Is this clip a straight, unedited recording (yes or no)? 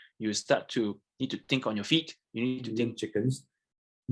no